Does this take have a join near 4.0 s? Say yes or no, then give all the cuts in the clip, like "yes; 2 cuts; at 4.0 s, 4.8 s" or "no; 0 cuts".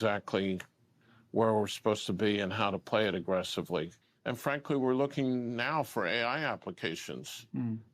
yes; 1 cut; at 4.0 s